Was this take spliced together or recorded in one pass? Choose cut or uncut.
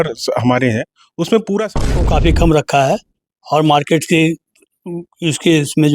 cut